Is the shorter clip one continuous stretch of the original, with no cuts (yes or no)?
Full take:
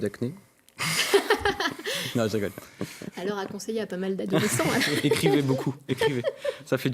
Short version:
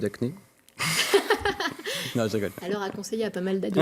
no